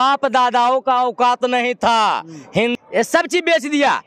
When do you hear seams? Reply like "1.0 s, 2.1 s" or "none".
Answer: 2.7 s